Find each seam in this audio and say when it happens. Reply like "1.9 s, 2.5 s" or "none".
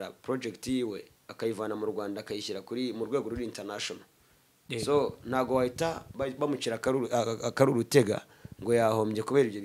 4.7 s